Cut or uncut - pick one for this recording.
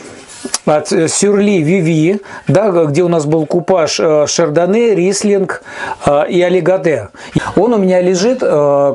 cut